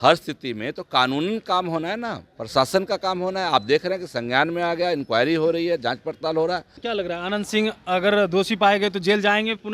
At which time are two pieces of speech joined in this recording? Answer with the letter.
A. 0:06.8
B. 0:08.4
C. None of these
A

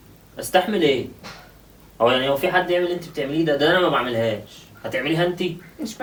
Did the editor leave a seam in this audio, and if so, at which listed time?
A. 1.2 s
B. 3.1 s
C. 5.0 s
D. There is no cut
D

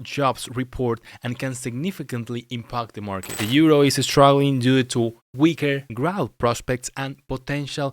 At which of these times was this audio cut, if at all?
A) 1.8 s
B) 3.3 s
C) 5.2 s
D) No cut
B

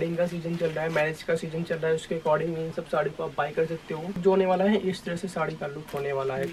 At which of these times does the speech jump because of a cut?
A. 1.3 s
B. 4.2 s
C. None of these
B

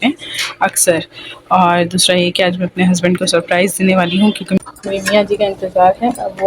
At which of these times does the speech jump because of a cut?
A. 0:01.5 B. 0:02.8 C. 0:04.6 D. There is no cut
C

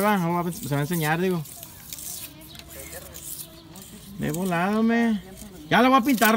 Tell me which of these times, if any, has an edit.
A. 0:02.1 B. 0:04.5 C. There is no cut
C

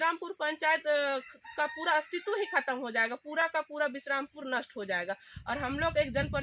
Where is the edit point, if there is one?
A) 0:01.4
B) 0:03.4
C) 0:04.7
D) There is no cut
D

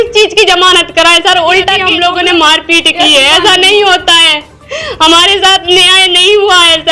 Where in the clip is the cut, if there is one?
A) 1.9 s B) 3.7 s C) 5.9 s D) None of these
A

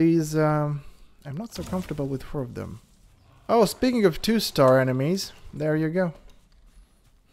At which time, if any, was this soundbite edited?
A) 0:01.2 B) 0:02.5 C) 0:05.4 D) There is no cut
B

